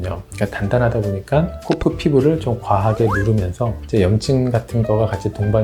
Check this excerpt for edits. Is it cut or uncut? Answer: cut